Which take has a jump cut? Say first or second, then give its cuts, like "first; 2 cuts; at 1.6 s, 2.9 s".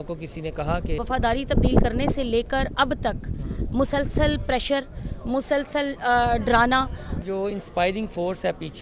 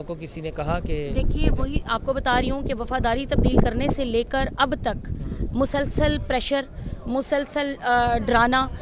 first; 2 cuts; at 1.0 s, 7.1 s